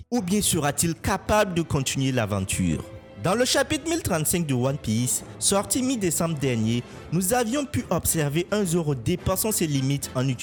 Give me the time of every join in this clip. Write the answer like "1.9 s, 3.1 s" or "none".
none